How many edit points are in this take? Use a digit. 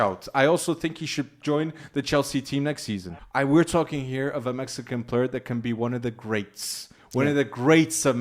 1